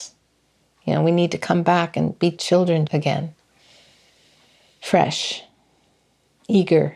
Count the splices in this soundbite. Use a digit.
1